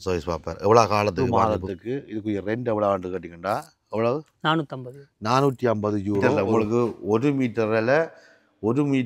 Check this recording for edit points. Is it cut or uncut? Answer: cut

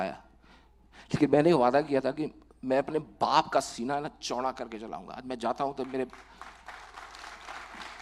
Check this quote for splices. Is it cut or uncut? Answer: uncut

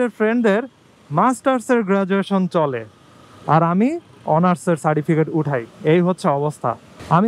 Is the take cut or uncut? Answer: uncut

